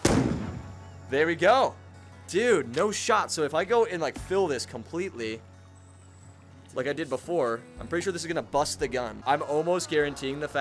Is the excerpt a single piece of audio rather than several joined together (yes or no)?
no